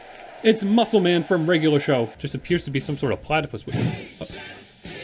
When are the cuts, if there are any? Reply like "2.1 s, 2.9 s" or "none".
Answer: 2.2 s